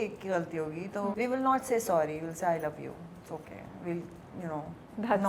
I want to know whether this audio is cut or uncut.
cut